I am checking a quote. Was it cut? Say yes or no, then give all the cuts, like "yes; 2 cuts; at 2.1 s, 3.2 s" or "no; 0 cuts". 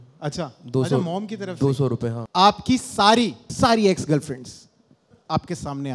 yes; 3 cuts; at 2.2 s, 3.5 s, 5.0 s